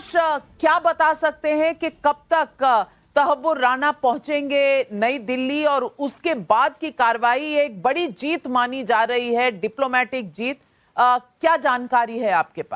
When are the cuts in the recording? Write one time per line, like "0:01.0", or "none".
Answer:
0:09.9